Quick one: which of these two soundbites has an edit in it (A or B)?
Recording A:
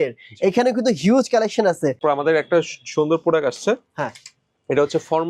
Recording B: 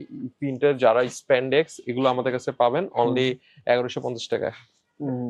A